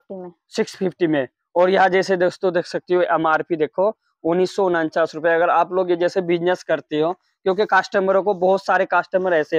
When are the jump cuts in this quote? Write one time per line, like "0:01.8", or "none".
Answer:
none